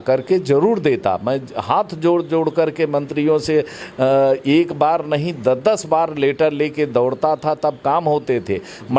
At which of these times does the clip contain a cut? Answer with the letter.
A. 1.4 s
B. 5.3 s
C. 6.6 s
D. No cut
D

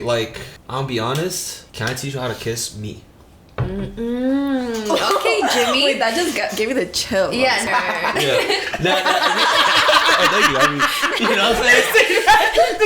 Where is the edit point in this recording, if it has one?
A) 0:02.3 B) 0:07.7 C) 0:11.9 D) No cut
B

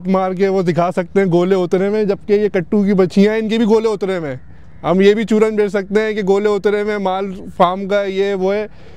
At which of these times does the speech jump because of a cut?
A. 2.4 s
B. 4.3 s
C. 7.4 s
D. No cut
D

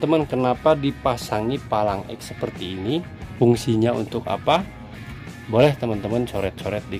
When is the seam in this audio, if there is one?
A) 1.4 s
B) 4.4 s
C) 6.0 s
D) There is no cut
D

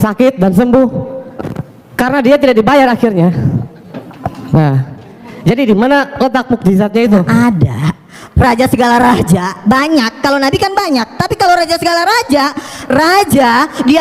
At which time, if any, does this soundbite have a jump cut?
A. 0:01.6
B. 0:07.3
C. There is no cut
B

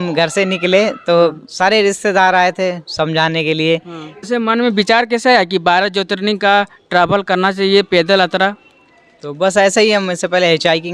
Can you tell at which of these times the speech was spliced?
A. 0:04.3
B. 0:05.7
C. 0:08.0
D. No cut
A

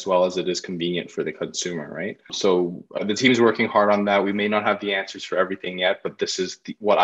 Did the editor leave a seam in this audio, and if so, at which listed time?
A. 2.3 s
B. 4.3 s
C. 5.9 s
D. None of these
A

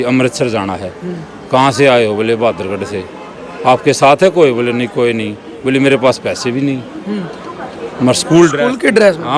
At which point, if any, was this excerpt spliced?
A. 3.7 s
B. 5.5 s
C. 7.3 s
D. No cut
D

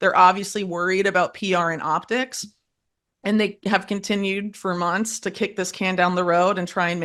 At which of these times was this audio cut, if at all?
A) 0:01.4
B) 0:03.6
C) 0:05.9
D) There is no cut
D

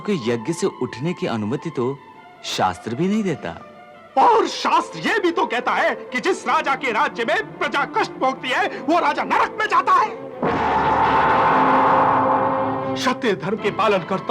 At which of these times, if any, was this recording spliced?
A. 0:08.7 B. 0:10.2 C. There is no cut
C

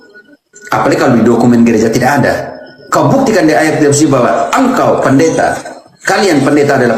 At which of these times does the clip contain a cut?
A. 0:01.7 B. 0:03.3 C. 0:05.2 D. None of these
D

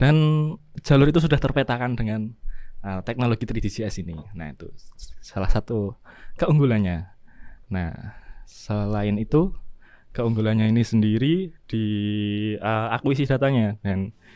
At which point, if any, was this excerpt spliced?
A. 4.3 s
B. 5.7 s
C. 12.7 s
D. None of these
D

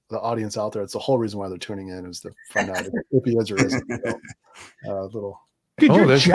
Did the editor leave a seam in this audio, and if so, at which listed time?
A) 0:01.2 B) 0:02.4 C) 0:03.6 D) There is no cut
D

